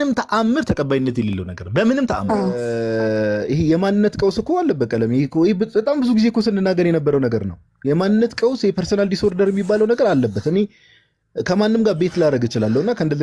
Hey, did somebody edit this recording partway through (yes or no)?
yes